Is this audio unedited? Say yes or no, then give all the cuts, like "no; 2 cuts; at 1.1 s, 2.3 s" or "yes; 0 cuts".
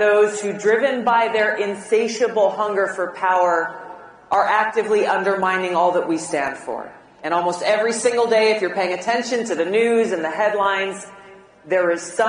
no; 2 cuts; at 3.2 s, 8.2 s